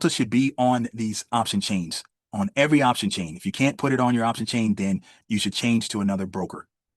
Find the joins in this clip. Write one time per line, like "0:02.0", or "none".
0:05.2